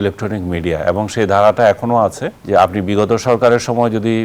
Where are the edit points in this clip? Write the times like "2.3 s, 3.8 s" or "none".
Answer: 2.3 s

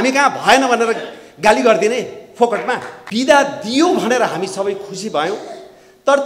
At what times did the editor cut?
3.0 s

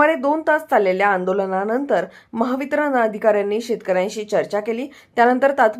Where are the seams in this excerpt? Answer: 3.6 s

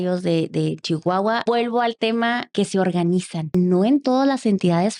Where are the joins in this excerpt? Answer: 1.4 s, 2.4 s, 3.5 s

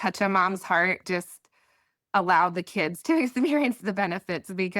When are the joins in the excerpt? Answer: 1.0 s

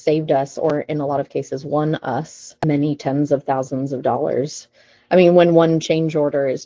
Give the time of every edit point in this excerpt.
2.5 s

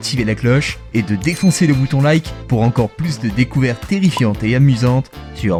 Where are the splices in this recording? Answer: none

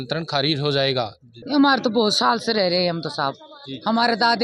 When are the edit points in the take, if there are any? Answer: 1.2 s

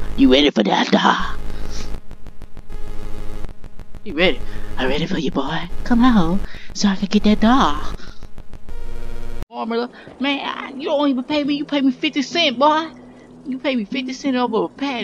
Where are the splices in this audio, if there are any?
9.6 s

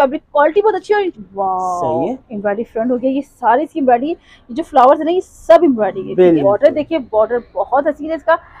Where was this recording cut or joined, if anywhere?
1.1 s, 6.4 s

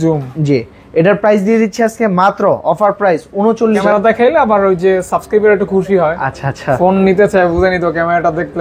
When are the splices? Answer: 3.8 s

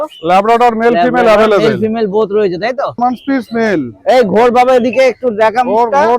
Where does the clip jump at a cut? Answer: 3.0 s

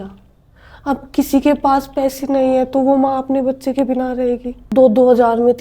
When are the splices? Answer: 4.7 s

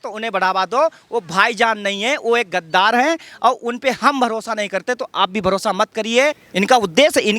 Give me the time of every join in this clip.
6.4 s

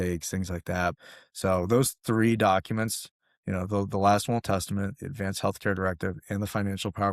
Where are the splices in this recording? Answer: 1.0 s

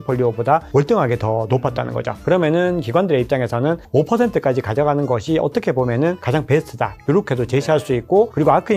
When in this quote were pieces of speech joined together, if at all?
none

